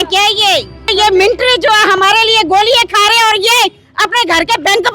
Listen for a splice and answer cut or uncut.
cut